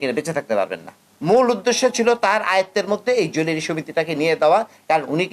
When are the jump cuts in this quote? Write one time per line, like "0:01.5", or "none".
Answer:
0:01.0